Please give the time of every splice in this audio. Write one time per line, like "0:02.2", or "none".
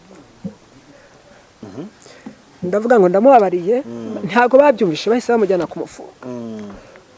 0:01.6